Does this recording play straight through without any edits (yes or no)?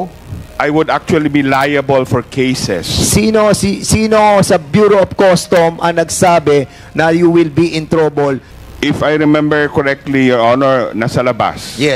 no